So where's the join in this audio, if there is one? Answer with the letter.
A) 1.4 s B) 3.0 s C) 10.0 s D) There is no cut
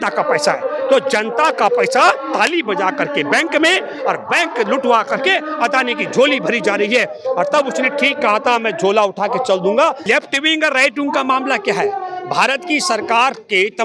C